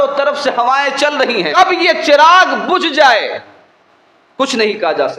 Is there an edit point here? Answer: yes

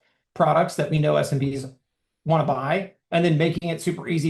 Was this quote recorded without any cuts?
yes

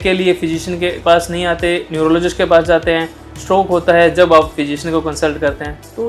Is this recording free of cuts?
yes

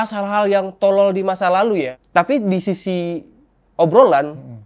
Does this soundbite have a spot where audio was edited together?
yes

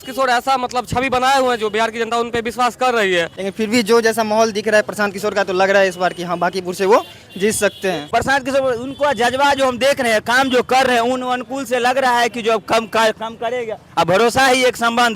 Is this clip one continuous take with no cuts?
no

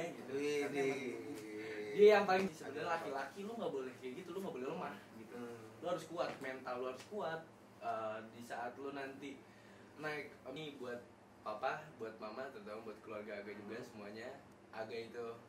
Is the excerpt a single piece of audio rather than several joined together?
no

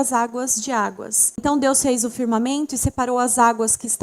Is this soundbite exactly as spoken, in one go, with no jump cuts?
no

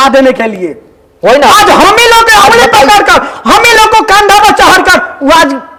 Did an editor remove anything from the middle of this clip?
no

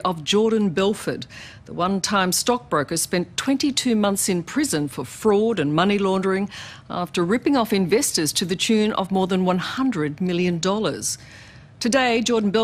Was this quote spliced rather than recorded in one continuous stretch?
no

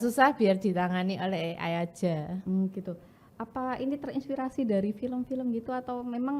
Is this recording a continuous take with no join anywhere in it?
yes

